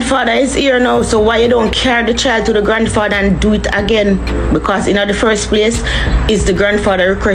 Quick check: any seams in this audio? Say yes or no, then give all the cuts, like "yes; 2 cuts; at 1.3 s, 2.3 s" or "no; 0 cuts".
no; 0 cuts